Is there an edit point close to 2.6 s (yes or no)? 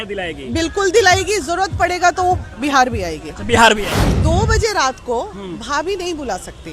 no